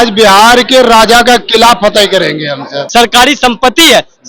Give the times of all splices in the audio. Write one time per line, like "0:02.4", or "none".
0:02.8